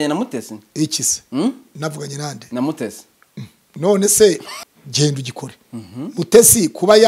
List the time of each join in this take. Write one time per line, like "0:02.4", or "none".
0:04.5